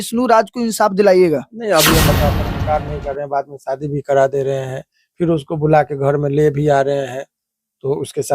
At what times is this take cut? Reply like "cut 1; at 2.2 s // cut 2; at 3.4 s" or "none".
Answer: cut 1; at 2.1 s